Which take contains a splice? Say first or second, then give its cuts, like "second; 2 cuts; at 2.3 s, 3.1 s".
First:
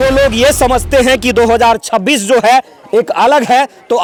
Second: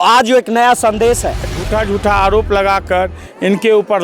second; 1 cut; at 1.5 s